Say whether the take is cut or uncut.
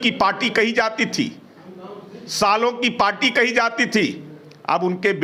uncut